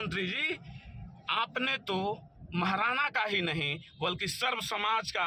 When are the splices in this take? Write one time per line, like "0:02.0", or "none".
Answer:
none